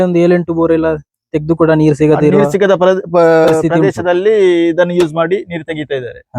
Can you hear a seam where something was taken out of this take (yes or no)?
no